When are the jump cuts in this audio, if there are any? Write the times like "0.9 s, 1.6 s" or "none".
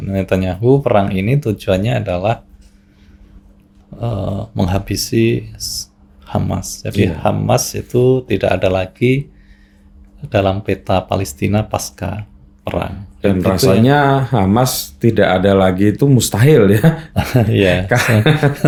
none